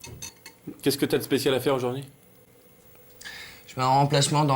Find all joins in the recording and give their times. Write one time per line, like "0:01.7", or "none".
0:02.5